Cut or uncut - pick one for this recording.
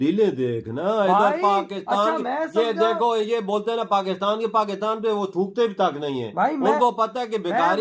uncut